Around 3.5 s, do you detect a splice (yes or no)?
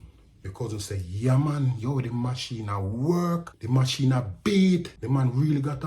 yes